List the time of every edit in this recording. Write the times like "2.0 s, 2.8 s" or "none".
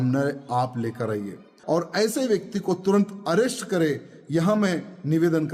1.5 s